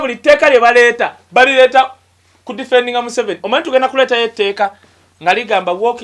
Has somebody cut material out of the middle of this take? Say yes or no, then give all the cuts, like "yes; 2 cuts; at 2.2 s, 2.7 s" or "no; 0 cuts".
no; 0 cuts